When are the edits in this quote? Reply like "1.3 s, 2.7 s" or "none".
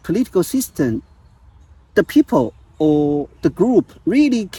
none